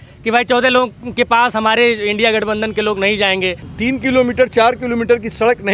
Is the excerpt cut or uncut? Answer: cut